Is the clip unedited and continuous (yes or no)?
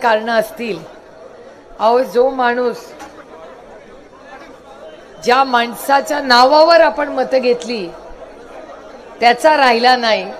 yes